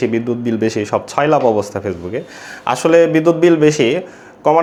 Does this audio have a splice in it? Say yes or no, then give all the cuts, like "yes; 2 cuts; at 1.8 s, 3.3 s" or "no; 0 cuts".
no; 0 cuts